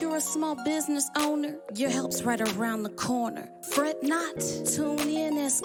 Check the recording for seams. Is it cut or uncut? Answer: uncut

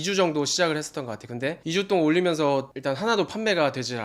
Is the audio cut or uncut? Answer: uncut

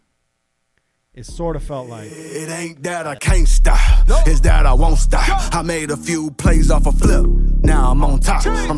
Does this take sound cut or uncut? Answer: cut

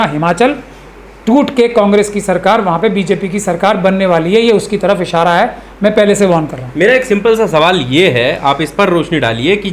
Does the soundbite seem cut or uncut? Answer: uncut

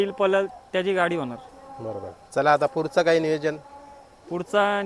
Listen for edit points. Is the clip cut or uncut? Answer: uncut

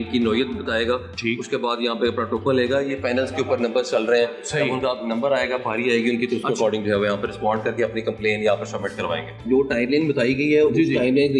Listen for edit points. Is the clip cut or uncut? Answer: cut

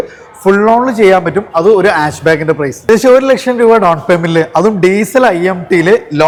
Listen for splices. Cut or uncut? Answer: uncut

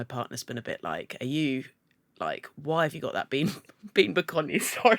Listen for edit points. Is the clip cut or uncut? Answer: uncut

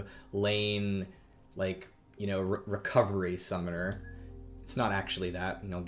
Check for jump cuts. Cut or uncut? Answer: uncut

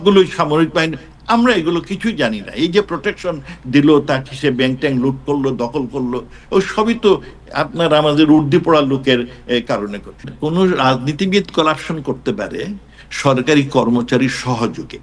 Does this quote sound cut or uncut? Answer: cut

